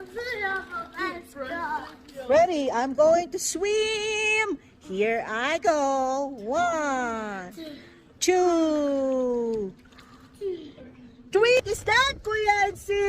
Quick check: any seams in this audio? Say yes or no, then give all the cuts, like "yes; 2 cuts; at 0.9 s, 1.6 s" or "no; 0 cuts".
yes; 1 cut; at 11.6 s